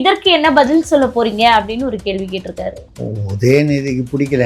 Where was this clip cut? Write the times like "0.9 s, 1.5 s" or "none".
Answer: 2.9 s